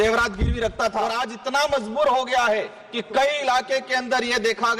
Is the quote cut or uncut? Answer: cut